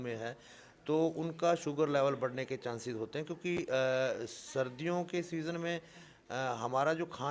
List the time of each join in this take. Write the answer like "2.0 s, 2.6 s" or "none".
none

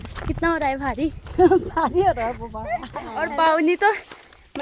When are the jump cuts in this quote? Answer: 3.2 s

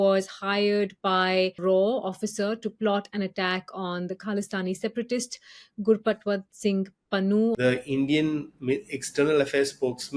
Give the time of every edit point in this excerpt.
1.6 s, 7.6 s

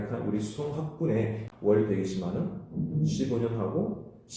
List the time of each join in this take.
1.5 s

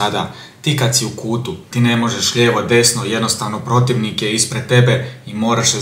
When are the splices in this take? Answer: 1.7 s

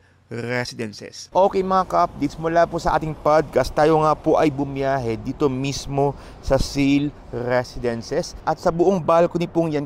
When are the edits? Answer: 1.1 s, 8.3 s

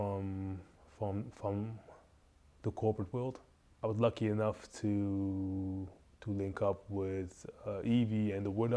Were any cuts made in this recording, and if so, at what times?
3.7 s

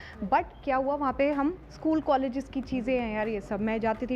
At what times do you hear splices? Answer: 1.7 s

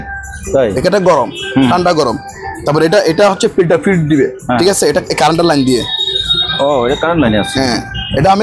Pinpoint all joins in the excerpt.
none

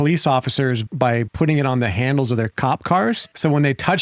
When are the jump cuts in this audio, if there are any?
0.9 s, 2.8 s

